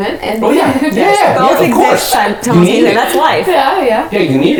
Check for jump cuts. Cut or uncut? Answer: uncut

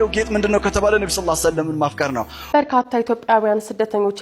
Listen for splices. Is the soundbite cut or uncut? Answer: cut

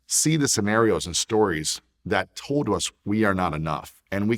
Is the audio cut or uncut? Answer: uncut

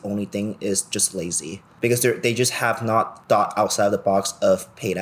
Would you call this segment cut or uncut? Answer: cut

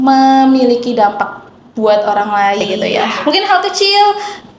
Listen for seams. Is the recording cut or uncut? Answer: cut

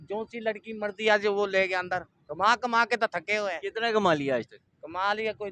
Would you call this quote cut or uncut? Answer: cut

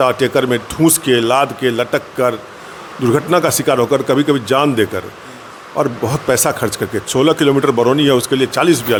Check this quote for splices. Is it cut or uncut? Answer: uncut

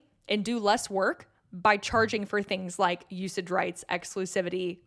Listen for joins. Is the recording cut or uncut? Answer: uncut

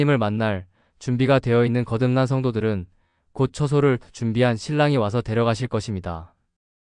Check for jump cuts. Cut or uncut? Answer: uncut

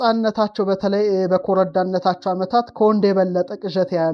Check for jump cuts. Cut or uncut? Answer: uncut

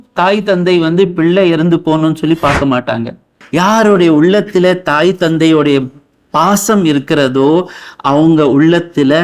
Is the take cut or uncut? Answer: cut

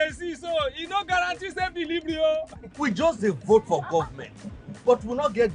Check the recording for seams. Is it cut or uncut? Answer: cut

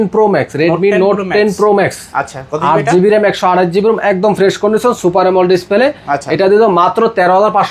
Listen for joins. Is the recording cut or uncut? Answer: uncut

